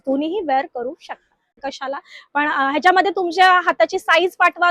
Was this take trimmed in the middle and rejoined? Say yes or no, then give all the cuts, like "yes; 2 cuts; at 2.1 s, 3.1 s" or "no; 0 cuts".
yes; 1 cut; at 1.6 s